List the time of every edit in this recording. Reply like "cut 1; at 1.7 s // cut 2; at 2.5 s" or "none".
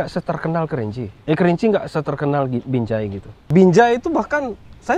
cut 1; at 1.1 s // cut 2; at 3.5 s